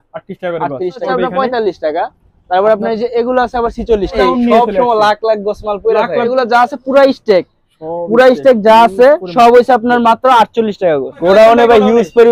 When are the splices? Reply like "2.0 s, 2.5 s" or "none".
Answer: 1.0 s, 4.2 s, 6.3 s, 11.2 s

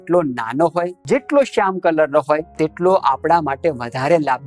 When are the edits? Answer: 1.0 s, 2.5 s

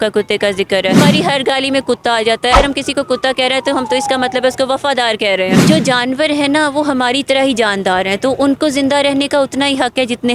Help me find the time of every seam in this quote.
1.0 s, 2.5 s, 5.6 s

